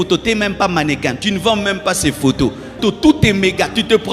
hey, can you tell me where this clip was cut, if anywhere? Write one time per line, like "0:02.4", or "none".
0:02.8